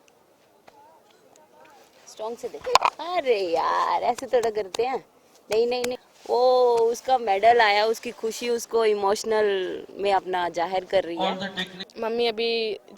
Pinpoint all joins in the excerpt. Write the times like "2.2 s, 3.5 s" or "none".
5.9 s, 11.8 s